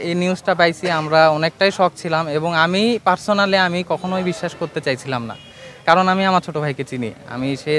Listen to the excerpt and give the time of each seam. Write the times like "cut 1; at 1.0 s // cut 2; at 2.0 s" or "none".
none